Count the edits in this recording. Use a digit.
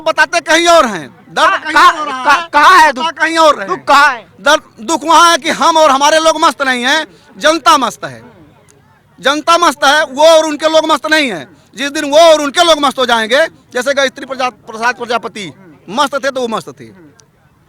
0